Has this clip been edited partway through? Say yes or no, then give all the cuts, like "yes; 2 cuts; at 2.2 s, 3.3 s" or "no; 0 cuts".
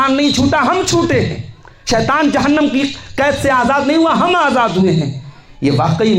no; 0 cuts